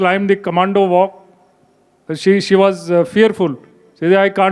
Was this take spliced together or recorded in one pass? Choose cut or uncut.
uncut